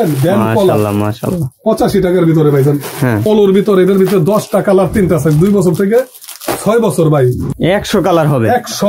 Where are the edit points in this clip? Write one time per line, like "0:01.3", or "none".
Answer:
0:03.2
0:07.4